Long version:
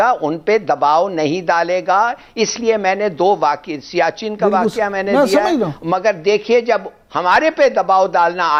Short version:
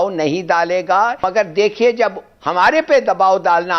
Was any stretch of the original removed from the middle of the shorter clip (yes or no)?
yes